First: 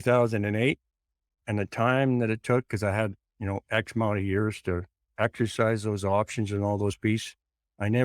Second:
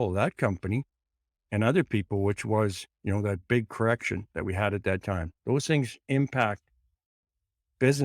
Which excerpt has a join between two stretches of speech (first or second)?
first